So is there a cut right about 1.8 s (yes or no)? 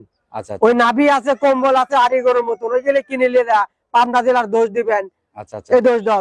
no